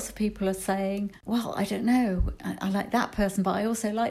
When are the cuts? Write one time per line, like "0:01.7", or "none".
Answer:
0:01.2